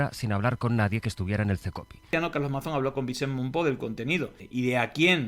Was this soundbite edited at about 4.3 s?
no; 1 cut; at 2.1 s

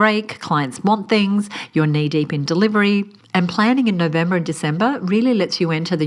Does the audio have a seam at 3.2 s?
yes; 1 cut; at 3.2 s

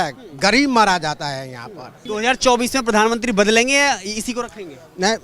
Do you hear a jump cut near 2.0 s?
yes; 1 cut; at 2.0 s

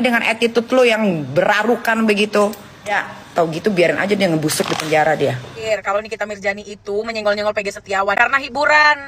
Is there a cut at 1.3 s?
no; 2 cuts; at 2.9 s, 5.7 s

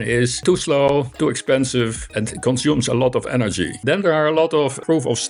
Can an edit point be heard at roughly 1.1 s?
no; 1 cut; at 3.8 s

